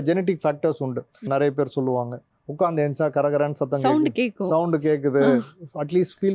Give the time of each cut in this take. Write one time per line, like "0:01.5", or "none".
0:01.3